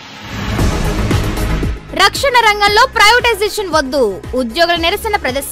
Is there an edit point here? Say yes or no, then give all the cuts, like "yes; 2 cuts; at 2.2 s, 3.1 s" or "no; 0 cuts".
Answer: yes; 1 cut; at 1.2 s